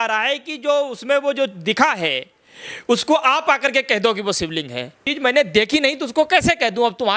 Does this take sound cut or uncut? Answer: cut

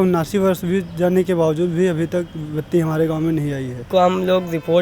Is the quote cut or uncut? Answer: cut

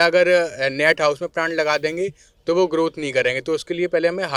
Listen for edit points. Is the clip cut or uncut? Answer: uncut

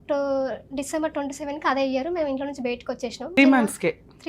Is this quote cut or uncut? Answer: cut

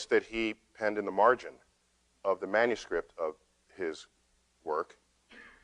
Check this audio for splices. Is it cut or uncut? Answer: cut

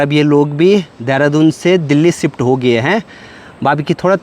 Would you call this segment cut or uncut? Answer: uncut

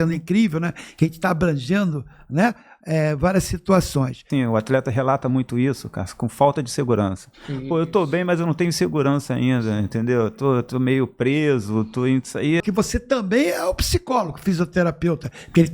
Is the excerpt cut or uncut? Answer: cut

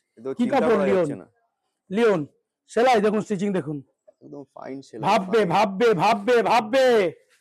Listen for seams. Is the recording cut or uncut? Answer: uncut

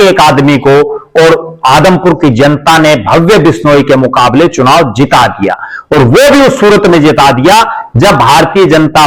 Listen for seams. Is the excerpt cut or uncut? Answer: uncut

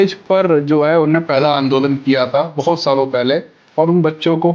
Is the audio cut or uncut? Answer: uncut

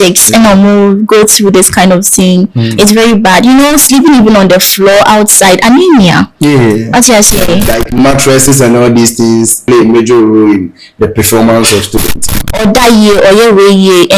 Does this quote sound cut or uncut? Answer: cut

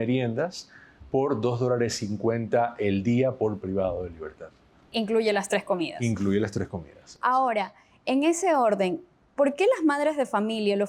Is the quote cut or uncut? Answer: uncut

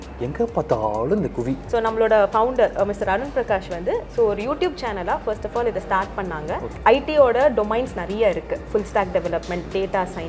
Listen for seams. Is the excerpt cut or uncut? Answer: cut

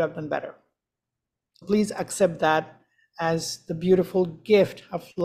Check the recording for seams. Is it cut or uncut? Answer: cut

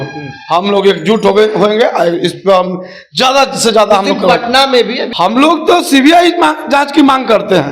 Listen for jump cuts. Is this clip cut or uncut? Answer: cut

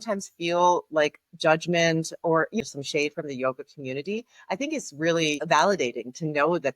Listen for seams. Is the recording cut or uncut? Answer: cut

